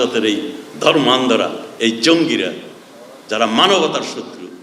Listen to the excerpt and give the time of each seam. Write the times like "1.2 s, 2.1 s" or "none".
none